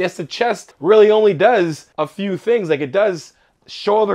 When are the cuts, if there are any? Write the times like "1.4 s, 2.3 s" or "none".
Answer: none